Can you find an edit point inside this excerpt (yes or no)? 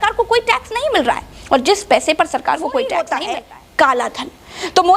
yes